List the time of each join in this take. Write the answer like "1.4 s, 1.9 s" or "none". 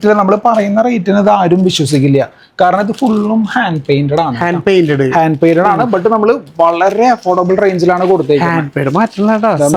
none